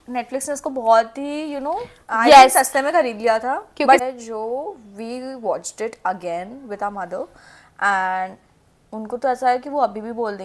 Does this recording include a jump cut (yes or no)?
yes